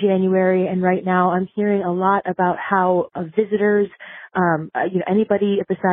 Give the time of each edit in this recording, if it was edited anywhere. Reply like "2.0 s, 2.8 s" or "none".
none